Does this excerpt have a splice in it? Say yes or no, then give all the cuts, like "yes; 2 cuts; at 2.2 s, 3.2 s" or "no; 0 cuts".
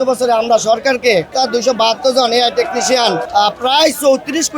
yes; 2 cuts; at 1.3 s, 3.2 s